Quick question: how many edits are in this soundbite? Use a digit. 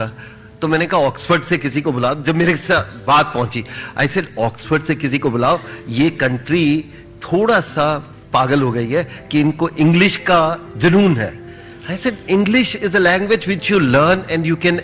0